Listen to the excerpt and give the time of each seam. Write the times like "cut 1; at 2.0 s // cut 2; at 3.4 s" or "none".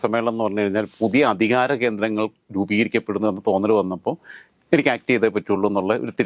cut 1; at 0.9 s